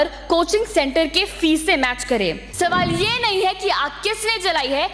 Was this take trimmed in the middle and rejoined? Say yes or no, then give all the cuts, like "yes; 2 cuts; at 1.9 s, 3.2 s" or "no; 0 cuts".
yes; 1 cut; at 2.4 s